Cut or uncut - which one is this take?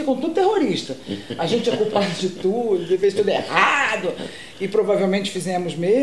uncut